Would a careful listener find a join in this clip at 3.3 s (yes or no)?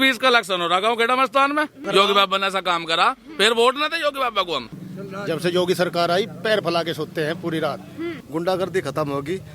no